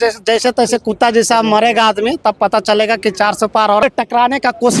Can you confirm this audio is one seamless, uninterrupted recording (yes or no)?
no